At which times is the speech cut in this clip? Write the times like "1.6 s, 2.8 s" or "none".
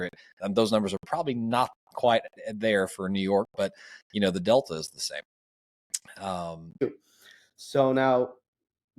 6.8 s